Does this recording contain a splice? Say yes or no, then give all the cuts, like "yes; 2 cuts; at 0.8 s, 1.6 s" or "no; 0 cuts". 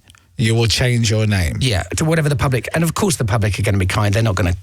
yes; 1 cut; at 1.9 s